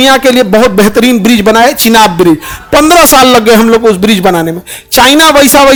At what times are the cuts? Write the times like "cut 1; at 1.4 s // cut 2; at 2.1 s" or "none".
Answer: none

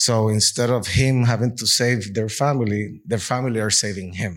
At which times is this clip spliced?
none

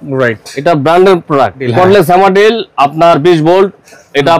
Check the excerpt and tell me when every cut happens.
cut 1; at 1.6 s

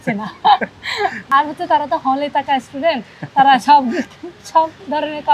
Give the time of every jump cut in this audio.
none

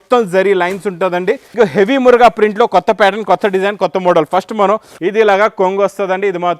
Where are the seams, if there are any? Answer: cut 1; at 1.5 s // cut 2; at 4.9 s

